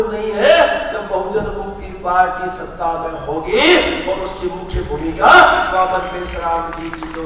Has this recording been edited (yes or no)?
no